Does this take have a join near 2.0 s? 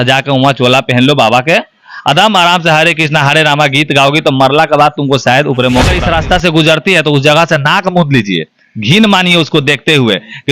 no; 1 cut; at 5.9 s

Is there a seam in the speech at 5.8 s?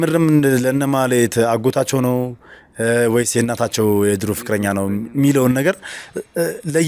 no; 0 cuts

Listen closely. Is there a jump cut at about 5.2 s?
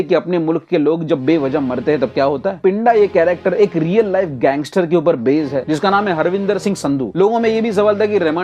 no; 2 cuts; at 2.6 s, 7.1 s

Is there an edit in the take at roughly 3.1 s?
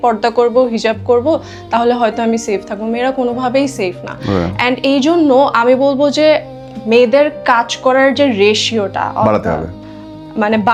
no; 0 cuts

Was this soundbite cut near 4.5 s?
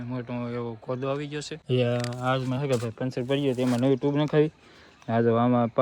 no; 1 cut; at 1.5 s

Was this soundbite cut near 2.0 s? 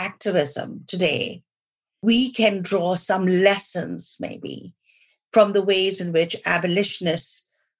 yes; 1 cut; at 2.0 s

